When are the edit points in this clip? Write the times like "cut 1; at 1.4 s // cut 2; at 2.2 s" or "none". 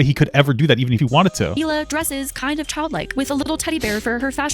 cut 1; at 1.0 s // cut 2; at 3.5 s